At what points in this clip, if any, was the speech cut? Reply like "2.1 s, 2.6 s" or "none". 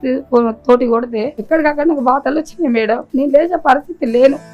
1.3 s, 3.1 s